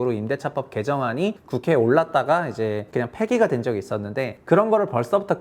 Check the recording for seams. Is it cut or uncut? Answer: cut